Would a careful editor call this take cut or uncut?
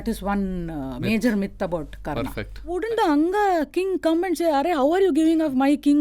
cut